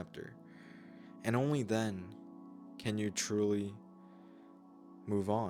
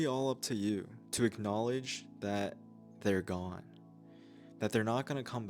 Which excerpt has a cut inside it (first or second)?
second